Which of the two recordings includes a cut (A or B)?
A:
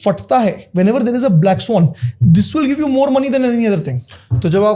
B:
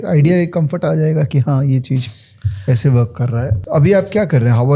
B